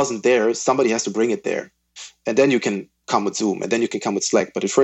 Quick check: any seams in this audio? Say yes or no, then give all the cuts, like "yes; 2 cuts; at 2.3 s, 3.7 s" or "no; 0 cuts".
yes; 1 cut; at 2.2 s